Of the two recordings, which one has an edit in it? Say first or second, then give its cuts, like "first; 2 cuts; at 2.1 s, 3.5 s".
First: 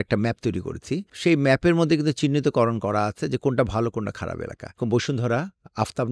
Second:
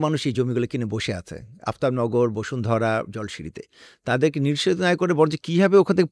first; 2 cuts; at 1.1 s, 4.8 s